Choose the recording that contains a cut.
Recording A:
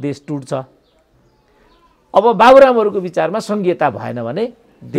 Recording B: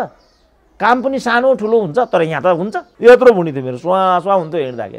B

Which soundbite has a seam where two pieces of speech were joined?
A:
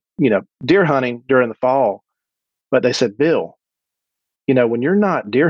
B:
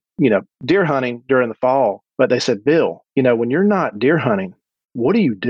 B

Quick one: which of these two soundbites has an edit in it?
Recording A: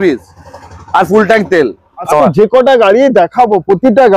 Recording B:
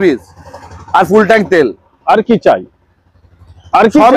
A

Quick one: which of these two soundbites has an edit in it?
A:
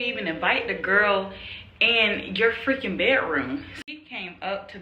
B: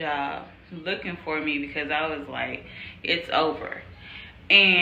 A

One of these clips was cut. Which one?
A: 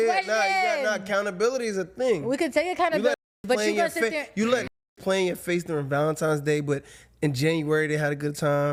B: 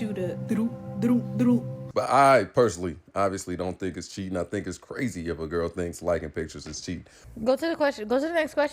B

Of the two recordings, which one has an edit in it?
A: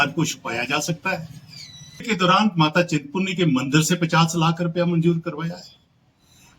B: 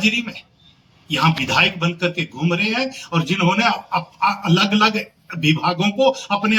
A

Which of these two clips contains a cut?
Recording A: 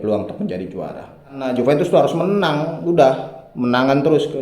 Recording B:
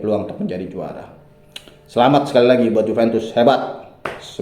A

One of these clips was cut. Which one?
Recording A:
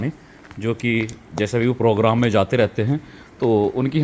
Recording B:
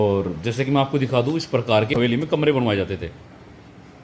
B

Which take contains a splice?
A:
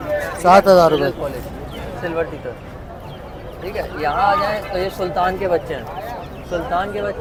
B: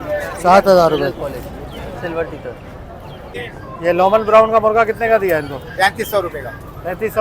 B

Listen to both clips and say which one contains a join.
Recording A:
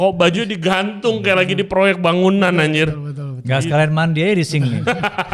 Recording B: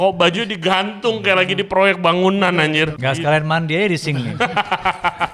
B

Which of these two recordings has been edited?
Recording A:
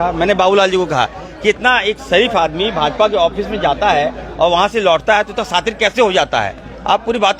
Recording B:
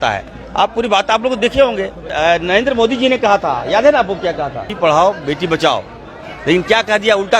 B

